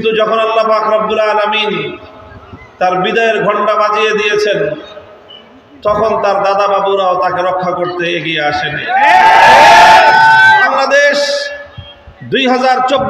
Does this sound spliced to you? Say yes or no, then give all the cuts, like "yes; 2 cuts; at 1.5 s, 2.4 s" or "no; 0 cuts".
yes; 1 cut; at 10.7 s